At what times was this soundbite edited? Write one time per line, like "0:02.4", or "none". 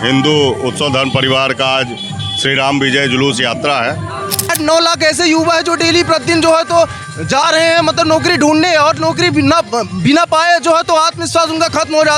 0:04.5